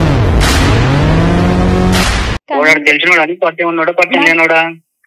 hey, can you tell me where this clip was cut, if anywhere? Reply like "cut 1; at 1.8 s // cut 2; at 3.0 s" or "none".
none